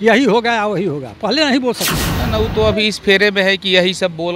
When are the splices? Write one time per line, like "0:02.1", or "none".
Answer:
0:02.1